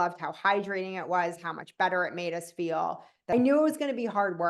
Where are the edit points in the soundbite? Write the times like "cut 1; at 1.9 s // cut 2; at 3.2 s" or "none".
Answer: cut 1; at 3.3 s